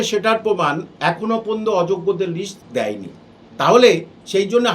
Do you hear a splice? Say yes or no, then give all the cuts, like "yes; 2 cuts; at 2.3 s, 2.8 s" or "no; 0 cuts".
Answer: yes; 1 cut; at 2.6 s